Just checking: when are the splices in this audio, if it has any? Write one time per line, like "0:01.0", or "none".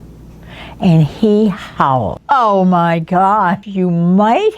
0:02.1
0:03.6